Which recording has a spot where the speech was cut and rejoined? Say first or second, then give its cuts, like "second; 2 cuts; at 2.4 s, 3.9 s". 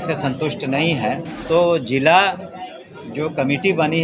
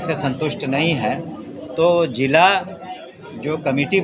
first; 1 cut; at 1.3 s